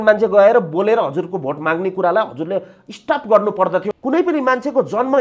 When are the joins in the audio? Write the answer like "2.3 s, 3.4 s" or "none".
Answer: 3.9 s